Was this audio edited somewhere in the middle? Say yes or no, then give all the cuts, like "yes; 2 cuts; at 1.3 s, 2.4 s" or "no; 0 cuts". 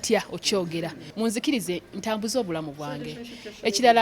yes; 1 cut; at 1.0 s